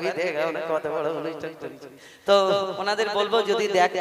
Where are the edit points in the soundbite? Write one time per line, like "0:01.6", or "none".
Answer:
none